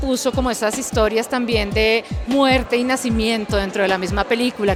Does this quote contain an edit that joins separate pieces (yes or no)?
no